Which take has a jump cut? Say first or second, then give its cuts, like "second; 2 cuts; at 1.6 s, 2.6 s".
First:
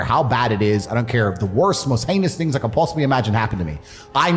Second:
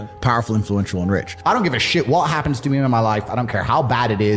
second; 1 cut; at 1.3 s